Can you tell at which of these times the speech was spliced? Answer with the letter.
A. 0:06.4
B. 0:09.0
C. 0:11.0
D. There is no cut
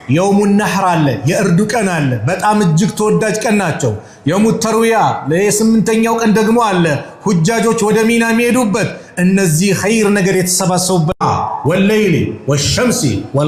D